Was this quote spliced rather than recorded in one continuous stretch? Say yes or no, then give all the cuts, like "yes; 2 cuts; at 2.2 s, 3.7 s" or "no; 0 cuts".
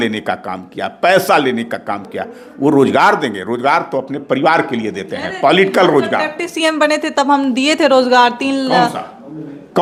no; 0 cuts